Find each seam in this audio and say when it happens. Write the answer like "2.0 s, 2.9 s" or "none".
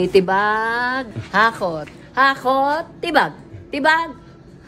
1.2 s